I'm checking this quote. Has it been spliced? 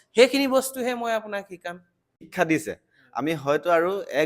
yes; 1 cut; at 2.2 s

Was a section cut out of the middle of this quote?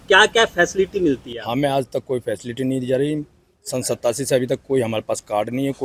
no; 0 cuts

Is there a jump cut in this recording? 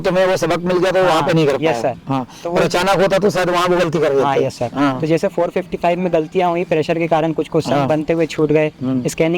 no; 0 cuts

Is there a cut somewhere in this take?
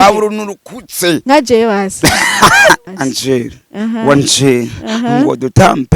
yes; 1 cut; at 2.9 s

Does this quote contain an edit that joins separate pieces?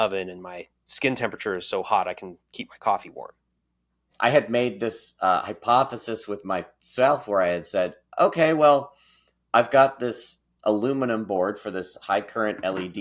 yes; 1 cut; at 4.1 s

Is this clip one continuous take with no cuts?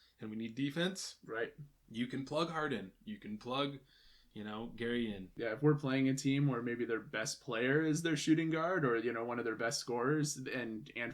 no; 1 cut; at 5.3 s

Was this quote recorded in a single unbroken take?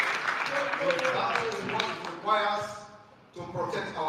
yes; 0 cuts

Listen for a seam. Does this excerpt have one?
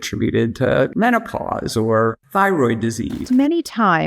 yes; 3 cuts; at 0.9 s, 2.2 s, 3.2 s

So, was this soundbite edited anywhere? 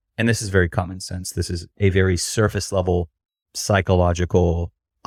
no; 0 cuts

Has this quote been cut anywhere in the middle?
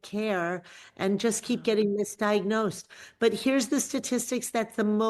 no; 0 cuts

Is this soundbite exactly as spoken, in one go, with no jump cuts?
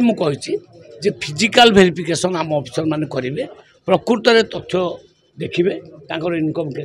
yes; 0 cuts

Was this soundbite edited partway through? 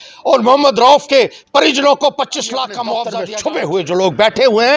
yes; 1 cut; at 3.1 s

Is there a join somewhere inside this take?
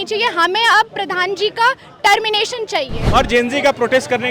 yes; 1 cut; at 3.0 s

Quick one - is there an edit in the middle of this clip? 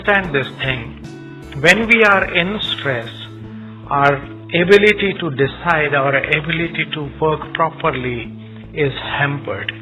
no; 0 cuts

